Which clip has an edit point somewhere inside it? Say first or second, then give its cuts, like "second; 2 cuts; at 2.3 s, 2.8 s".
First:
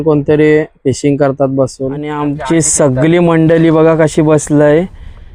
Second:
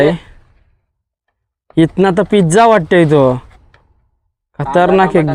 first; 1 cut; at 2.2 s